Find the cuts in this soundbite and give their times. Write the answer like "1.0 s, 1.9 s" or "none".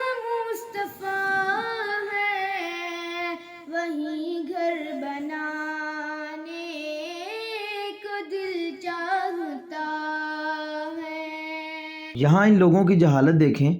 12.0 s